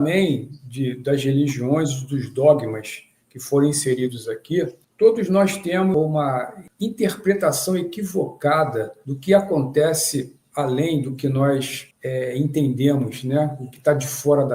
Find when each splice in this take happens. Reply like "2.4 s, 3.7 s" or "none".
none